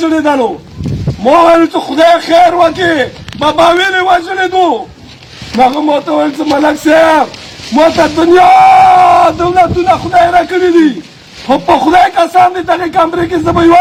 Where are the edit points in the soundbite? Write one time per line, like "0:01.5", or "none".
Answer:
none